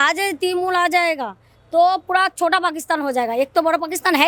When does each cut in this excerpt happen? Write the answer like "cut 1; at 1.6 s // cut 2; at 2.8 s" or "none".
none